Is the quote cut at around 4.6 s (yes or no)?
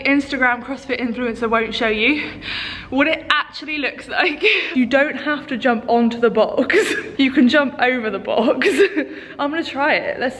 yes